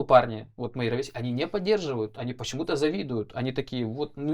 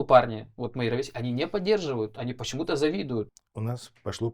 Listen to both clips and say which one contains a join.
second; 1 cut; at 3.3 s

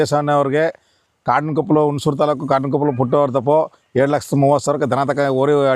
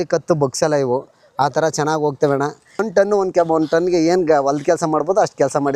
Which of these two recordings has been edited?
second; 1 cut; at 2.7 s

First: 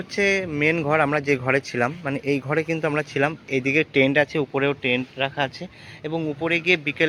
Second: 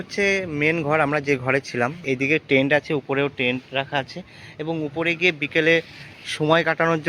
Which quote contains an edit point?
second; 1 cut; at 2.0 s

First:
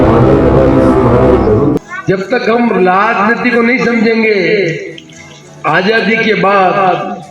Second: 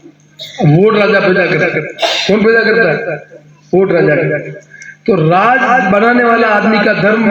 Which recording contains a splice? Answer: first; 1 cut; at 1.8 s

